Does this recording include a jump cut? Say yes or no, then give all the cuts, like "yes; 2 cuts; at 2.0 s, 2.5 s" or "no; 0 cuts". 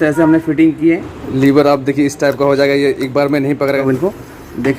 yes; 2 cuts; at 1.1 s, 3.8 s